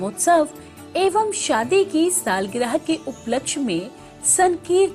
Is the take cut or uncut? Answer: uncut